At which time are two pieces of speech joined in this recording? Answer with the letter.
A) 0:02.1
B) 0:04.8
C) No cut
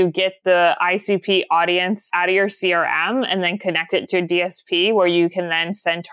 A